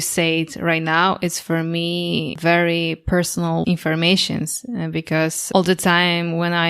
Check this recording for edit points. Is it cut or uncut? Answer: cut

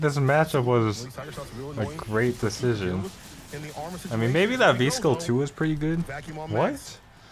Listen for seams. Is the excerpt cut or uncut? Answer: uncut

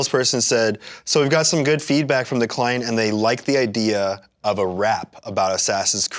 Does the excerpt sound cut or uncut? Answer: uncut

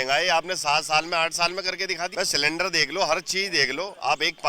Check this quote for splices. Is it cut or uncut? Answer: cut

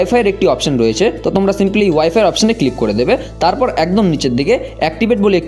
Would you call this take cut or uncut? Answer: uncut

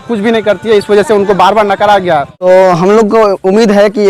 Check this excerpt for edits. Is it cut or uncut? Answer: cut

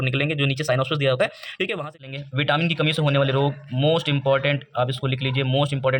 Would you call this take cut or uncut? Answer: cut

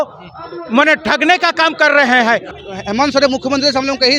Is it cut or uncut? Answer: cut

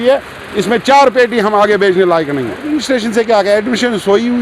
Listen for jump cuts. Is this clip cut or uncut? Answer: cut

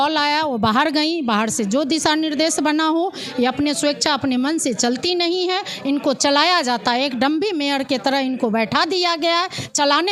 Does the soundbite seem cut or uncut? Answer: uncut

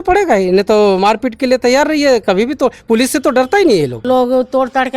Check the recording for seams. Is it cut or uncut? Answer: cut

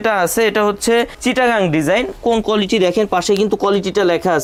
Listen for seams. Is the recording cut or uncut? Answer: uncut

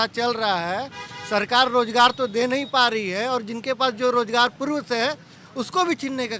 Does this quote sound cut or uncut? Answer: uncut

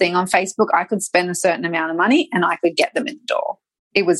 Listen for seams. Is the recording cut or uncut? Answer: uncut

